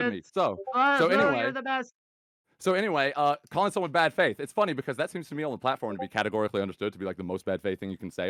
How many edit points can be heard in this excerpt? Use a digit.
0